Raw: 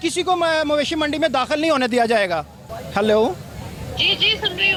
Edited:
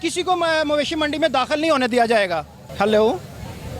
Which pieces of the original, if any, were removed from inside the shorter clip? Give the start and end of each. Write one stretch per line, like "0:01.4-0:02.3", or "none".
0:02.6-0:02.7